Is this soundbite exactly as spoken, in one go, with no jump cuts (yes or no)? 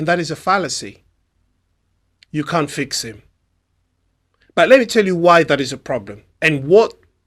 yes